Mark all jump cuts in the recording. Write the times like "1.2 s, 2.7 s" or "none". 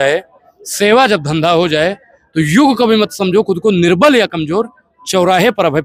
none